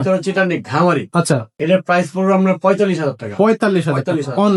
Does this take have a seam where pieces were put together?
no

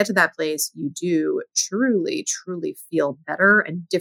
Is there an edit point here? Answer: no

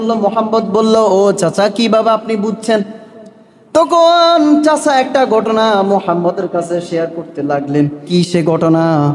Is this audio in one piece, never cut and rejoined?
no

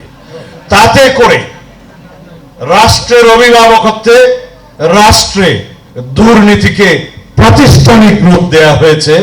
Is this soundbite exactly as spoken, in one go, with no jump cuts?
yes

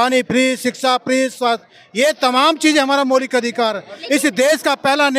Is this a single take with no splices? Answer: yes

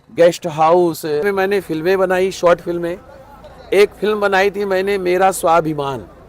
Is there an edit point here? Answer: yes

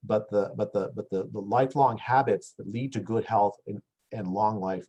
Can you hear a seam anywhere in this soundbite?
no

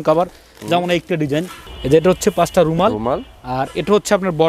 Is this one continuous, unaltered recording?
no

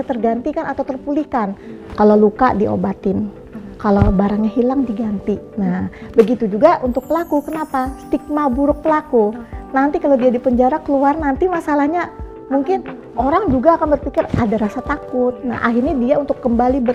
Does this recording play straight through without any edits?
yes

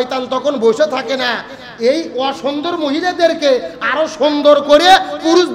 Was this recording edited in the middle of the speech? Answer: no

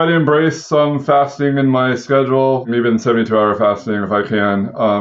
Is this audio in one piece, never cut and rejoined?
no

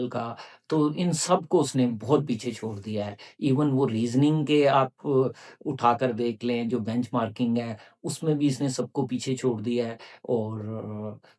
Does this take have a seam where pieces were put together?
no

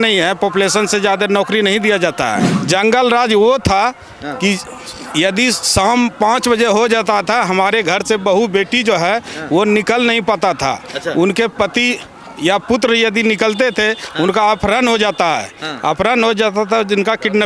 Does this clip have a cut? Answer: yes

